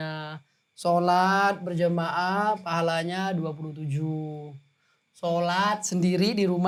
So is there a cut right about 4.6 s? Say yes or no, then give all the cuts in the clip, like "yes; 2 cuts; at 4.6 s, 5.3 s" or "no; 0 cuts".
no; 0 cuts